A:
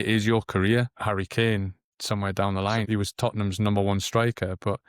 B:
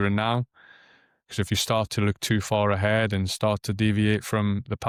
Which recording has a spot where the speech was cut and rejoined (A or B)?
A